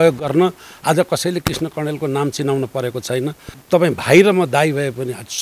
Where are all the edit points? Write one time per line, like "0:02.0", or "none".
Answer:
0:03.5